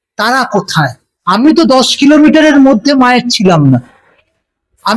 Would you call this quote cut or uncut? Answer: cut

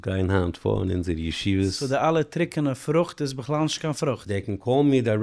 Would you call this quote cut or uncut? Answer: cut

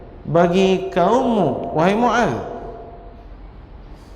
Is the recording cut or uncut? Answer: uncut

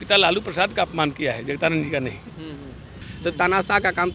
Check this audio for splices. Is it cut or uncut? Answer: cut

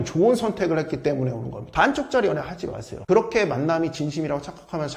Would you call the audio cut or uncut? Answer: cut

